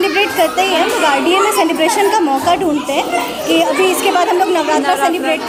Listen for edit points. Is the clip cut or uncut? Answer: uncut